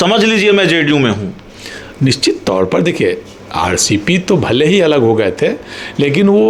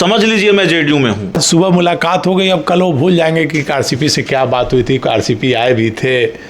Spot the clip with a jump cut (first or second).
second